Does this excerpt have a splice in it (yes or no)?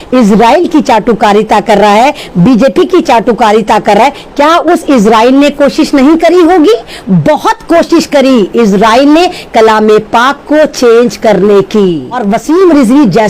yes